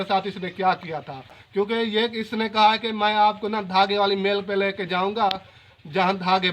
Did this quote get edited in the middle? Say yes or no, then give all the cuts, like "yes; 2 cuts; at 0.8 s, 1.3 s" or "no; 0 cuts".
yes; 1 cut; at 1.4 s